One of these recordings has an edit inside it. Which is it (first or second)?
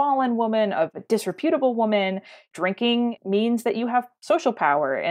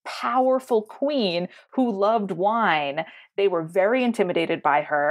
first